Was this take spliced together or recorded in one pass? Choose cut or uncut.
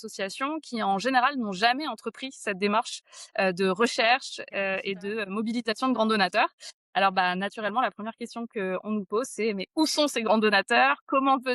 uncut